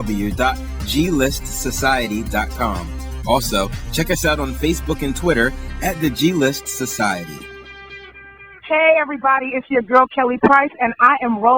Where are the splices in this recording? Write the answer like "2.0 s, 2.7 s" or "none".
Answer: 8.7 s